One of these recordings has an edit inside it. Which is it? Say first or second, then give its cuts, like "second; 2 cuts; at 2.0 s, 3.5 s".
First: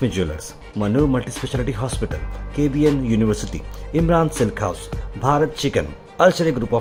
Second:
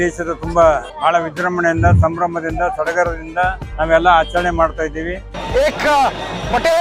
second; 3 cuts; at 0.9 s, 3.6 s, 5.3 s